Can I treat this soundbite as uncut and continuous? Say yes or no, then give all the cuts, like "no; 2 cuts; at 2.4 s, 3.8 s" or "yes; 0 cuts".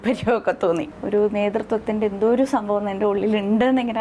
no; 1 cut; at 0.9 s